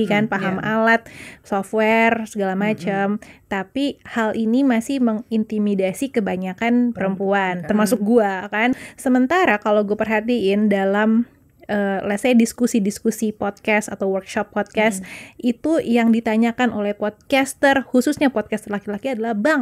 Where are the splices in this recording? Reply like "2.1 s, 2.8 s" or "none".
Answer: 1.3 s, 8.8 s